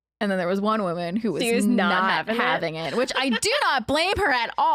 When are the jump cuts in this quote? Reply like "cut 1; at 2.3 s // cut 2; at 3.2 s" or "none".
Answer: none